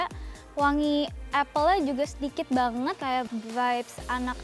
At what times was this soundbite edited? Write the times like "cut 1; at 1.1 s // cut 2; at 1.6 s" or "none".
cut 1; at 3.0 s